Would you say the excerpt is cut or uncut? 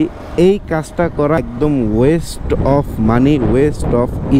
cut